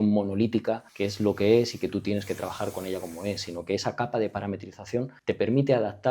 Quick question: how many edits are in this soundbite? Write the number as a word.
two